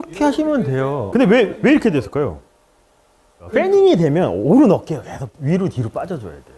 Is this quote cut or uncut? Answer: cut